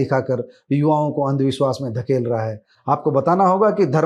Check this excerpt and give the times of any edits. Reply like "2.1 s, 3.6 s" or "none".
none